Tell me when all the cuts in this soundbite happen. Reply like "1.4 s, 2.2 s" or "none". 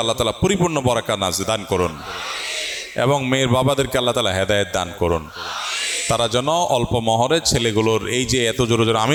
none